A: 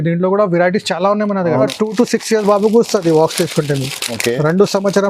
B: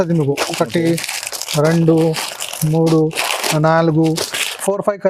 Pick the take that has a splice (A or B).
A